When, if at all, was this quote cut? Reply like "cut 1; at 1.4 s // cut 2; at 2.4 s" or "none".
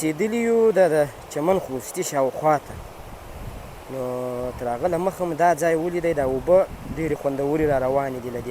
none